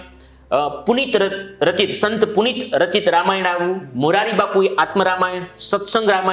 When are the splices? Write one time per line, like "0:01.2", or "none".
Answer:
none